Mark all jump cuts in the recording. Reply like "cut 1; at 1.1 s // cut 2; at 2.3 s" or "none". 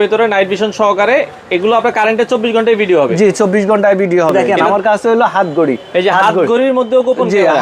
cut 1; at 4.5 s